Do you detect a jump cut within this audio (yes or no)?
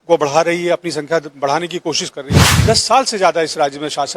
yes